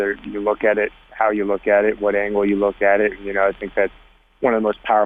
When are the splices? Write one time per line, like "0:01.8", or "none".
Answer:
none